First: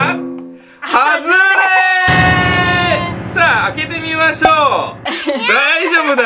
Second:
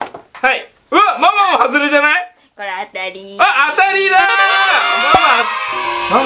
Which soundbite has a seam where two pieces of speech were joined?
first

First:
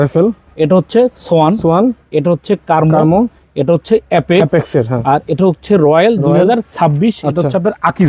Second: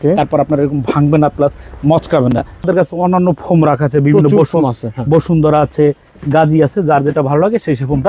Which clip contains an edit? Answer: second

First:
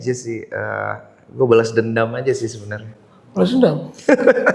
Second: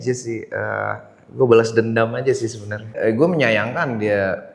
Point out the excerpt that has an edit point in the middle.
second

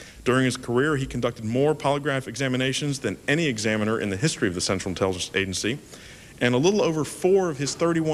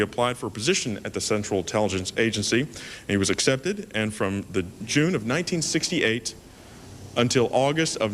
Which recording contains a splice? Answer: second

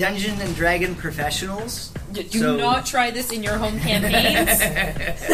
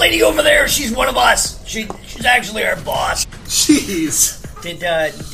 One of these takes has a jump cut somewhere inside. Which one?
second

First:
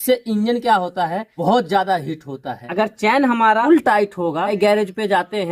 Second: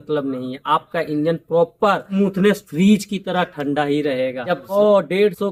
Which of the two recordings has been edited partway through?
first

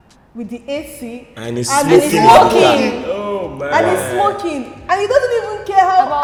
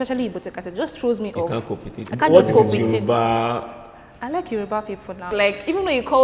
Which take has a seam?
second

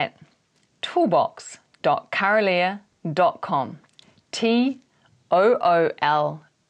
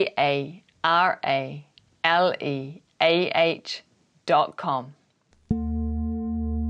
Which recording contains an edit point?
second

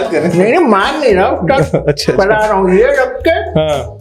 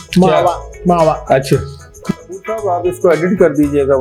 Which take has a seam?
second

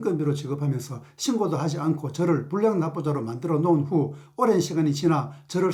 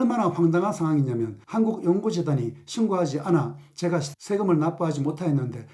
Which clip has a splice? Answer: second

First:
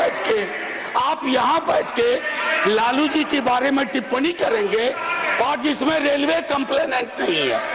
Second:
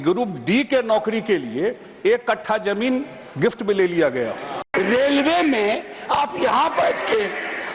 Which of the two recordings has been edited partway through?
second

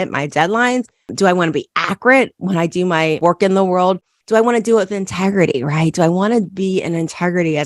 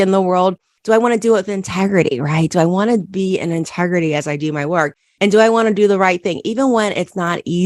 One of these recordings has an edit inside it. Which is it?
first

